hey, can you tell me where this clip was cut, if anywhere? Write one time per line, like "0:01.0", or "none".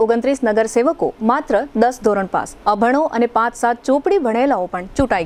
none